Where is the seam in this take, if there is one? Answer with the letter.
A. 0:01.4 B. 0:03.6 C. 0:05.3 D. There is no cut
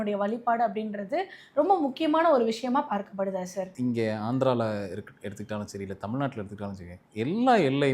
B